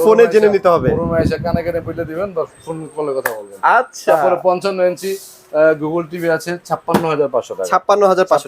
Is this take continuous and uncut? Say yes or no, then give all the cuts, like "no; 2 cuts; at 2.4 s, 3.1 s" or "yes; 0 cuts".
yes; 0 cuts